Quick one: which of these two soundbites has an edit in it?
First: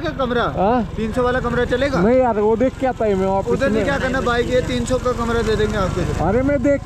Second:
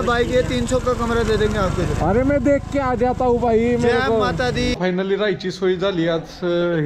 second; 1 cut; at 4.8 s

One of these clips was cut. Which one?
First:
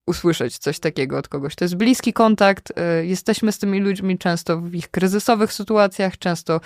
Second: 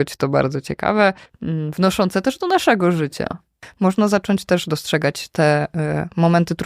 second; 2 cuts; at 1.3 s, 3.7 s

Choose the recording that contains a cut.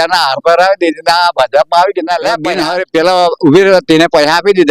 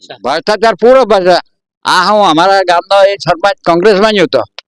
first; 1 cut; at 2.5 s

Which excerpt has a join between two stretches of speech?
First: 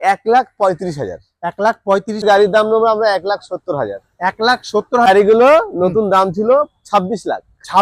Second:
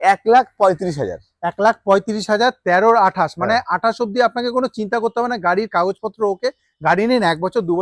first; 2 cuts; at 2.2 s, 5.1 s

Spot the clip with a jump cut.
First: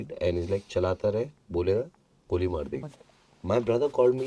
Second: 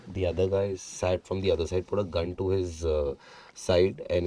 first; 1 cut; at 2.8 s

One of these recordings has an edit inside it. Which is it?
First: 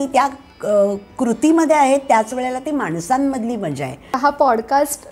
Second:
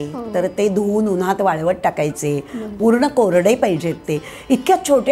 first; 1 cut; at 4.2 s

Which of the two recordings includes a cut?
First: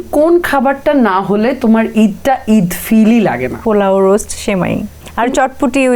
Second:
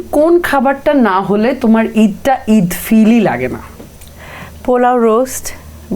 first; 2 cuts; at 3.6 s, 5.0 s

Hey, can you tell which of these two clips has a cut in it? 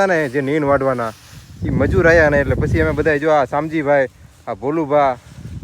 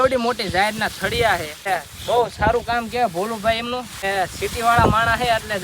second; 2 cuts; at 1.6 s, 4.0 s

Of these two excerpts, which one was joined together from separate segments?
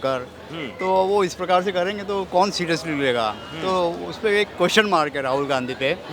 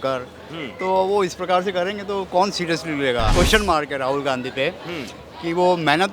second; 1 cut; at 3.3 s

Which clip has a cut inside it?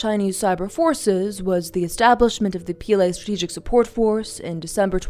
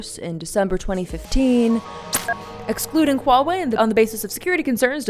second; 2 cuts; at 2.2 s, 3.7 s

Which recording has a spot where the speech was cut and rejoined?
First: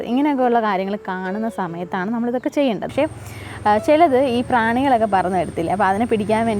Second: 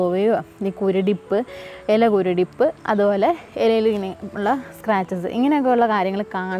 first; 1 cut; at 2.9 s

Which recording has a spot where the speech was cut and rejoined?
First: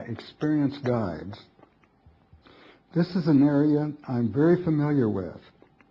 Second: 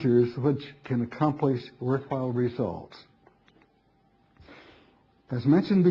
second; 1 cut; at 4.9 s

